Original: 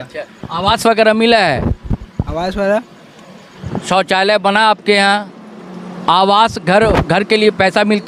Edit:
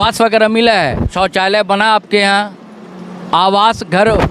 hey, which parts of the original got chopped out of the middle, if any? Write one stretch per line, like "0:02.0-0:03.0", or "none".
0:01.8-0:03.9

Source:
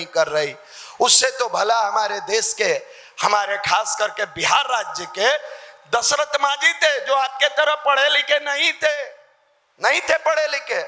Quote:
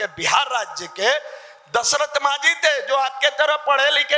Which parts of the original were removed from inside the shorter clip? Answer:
none

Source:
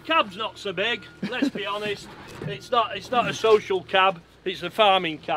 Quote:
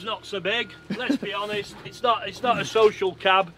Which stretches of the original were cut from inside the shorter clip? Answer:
0:02.2-0:02.5

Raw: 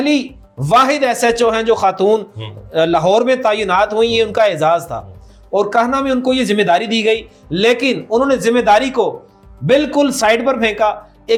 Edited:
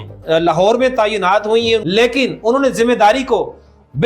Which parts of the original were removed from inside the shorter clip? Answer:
0:04.3-0:07.5

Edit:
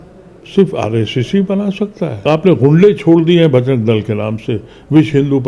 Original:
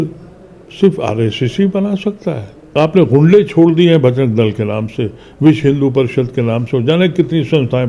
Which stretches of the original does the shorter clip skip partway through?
0:02.4-0:02.6

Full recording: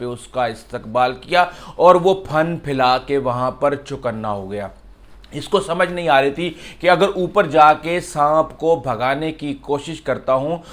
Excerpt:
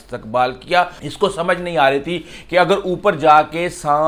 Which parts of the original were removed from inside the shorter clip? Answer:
0:01.6-0:05.3

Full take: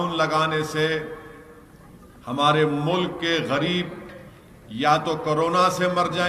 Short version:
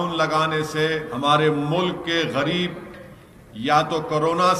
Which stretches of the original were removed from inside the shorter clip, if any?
0:01.1-0:02.2

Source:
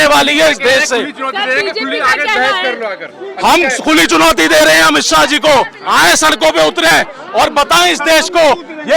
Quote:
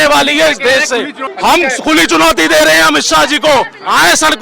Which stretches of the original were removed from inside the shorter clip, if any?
0:01.2-0:03.2

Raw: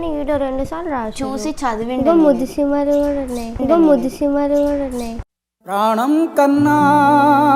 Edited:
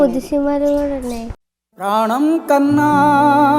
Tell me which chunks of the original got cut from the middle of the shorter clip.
0:03.5-0:05.2

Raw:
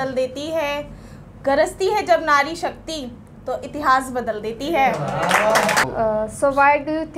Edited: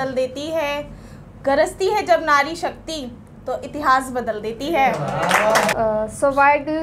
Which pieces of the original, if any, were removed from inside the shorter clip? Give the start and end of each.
0:05.7-0:05.9

